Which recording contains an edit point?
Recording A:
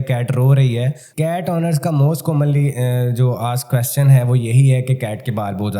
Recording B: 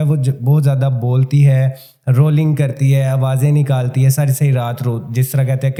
A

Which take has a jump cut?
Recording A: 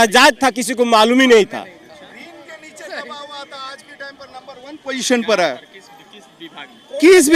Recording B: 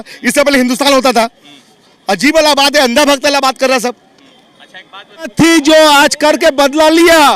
B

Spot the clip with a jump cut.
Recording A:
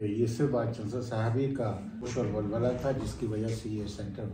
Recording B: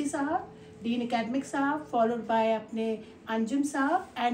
A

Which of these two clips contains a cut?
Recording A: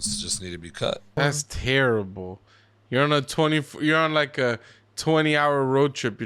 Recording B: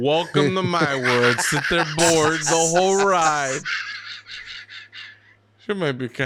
A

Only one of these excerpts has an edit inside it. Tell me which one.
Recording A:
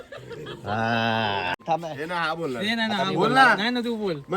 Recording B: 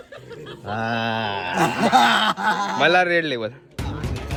A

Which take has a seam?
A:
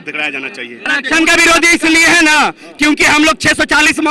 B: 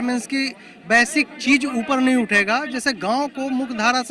A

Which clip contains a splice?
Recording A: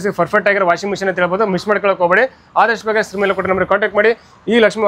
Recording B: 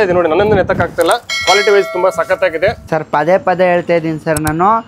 B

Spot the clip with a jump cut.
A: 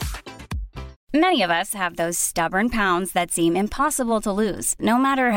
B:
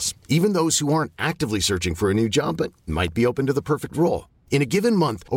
A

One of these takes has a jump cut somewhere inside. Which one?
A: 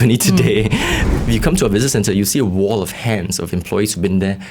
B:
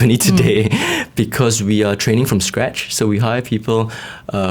A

